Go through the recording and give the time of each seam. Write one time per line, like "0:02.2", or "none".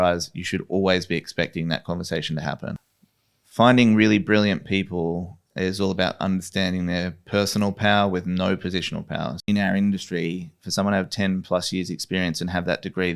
0:02.9
0:09.5